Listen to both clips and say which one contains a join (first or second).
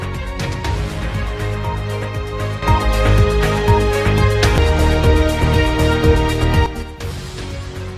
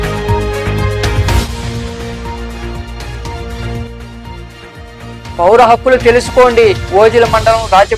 second